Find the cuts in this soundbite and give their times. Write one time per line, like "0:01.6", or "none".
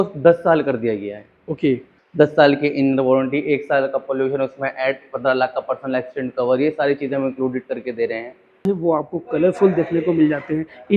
0:02.0
0:08.6